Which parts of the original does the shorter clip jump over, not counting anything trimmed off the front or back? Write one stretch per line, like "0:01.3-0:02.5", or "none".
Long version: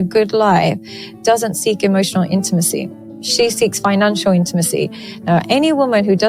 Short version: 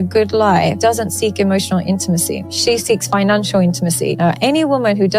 0:00.8-0:01.2
0:02.9-0:03.2
0:04.9-0:05.2